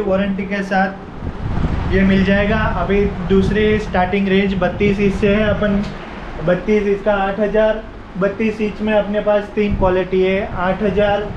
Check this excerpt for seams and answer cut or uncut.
uncut